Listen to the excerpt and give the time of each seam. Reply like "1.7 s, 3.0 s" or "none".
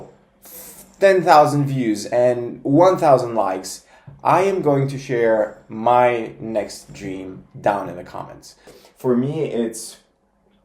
8.6 s